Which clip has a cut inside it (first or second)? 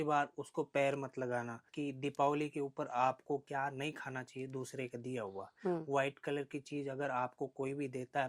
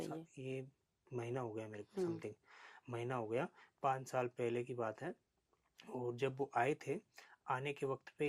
first